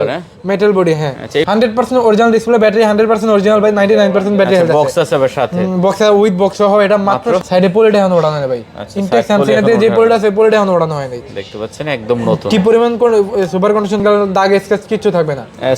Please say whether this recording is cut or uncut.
cut